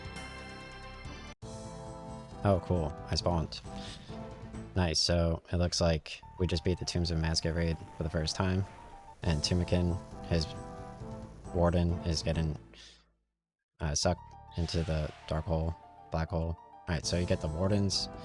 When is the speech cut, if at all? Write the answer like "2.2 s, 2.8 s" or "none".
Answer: none

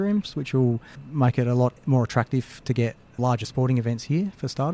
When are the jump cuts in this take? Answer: 3.2 s

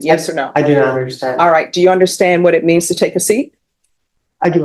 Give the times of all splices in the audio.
none

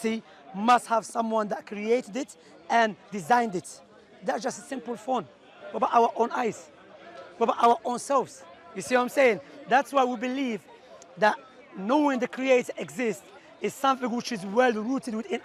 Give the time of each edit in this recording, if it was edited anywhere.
none

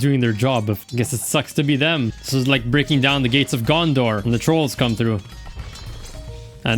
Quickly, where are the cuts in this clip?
0.9 s, 2.2 s, 4.2 s

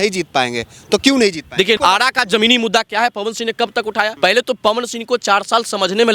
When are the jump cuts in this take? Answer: 1.8 s, 4.1 s

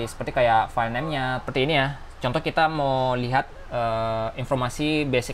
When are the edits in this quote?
1.4 s

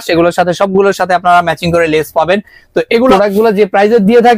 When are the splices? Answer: 3.1 s

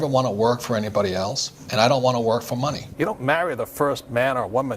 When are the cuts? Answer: 2.8 s

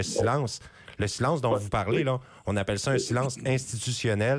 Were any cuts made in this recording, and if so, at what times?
none

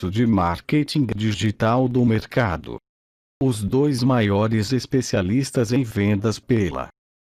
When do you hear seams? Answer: none

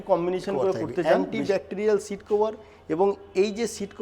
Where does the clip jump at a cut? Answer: 1.3 s

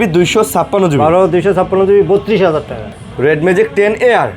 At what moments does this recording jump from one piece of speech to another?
2.9 s

